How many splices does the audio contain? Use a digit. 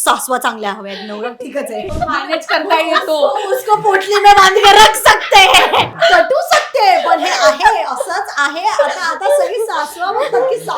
2